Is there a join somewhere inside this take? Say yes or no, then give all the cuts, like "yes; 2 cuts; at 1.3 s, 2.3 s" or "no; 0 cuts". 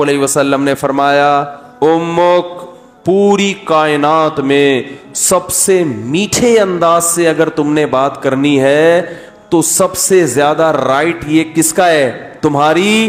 no; 0 cuts